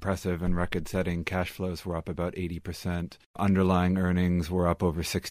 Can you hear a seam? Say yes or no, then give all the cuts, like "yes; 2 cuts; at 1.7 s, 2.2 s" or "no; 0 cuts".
yes; 1 cut; at 3.2 s